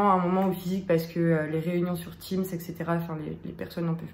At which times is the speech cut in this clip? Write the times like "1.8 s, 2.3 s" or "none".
none